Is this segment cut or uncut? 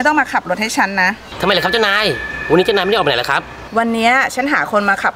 uncut